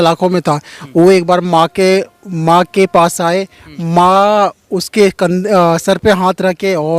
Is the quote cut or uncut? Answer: uncut